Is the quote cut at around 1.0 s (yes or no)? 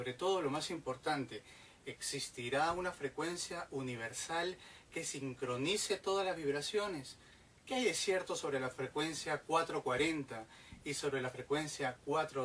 yes